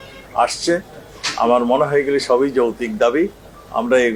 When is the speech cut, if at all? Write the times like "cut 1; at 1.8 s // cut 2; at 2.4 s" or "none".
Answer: none